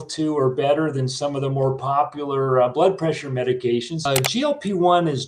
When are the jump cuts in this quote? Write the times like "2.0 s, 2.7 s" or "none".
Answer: 4.0 s